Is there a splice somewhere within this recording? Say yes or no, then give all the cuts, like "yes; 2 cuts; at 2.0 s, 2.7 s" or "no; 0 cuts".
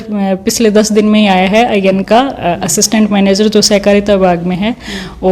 no; 0 cuts